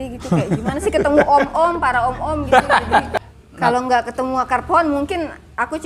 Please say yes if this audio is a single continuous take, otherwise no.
no